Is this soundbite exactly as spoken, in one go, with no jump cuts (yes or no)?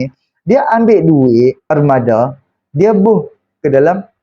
no